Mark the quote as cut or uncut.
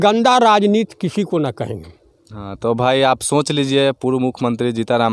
uncut